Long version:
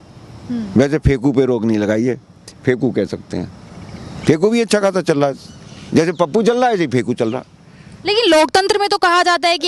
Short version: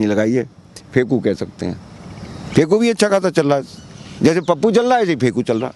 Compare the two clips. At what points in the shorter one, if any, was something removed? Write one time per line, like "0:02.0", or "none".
none